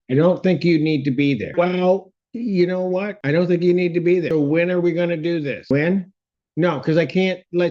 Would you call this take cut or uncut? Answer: cut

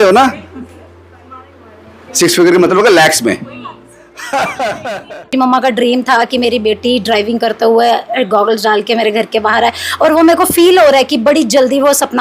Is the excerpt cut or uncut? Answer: cut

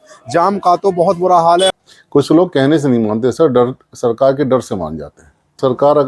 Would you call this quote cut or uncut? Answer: cut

